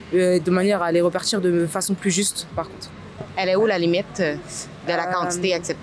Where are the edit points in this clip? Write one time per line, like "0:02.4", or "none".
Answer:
none